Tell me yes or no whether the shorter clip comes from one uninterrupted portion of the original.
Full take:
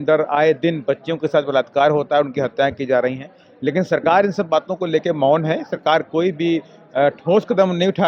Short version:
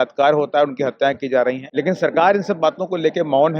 no